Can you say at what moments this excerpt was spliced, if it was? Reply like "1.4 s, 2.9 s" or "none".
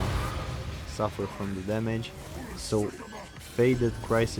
none